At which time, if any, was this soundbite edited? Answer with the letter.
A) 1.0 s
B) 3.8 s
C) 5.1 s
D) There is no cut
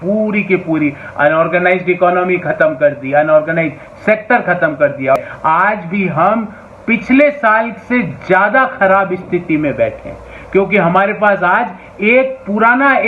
C